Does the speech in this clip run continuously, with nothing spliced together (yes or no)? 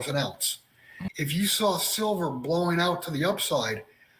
no